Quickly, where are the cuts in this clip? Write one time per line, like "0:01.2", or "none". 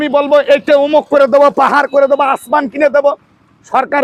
none